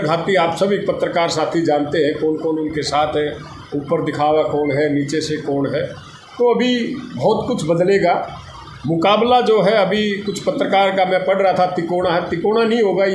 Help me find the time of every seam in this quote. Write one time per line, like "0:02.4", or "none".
none